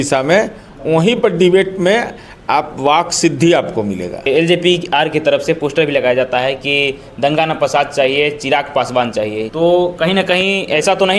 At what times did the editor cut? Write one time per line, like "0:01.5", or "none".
0:04.1
0:09.5